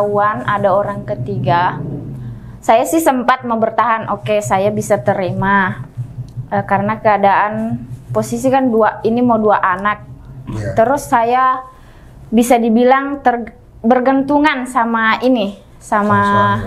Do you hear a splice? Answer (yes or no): no